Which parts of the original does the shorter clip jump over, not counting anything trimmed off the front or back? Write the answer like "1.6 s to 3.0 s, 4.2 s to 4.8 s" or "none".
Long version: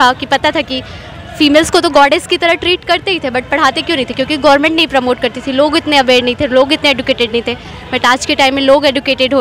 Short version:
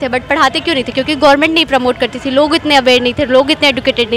none

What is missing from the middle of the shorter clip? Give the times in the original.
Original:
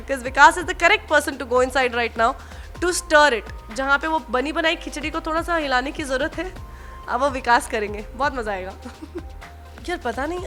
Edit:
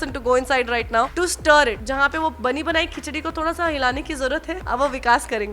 2.4 s to 2.8 s, 3.5 s to 3.7 s, 6.4 s to 7.0 s

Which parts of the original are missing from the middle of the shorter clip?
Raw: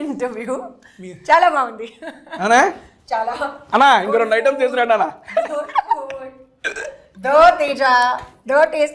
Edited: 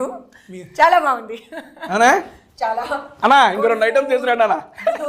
none

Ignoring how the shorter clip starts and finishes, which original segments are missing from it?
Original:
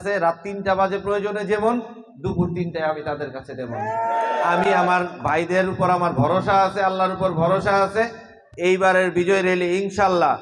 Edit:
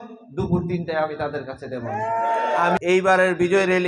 4.6 s to 8.5 s

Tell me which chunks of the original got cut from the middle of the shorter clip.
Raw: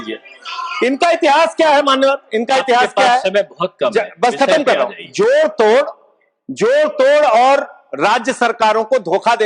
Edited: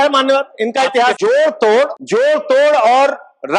2.9 s to 5.1 s, 6.0 s to 6.5 s

